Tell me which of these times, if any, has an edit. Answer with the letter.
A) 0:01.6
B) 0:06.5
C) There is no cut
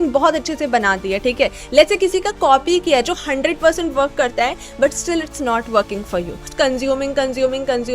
B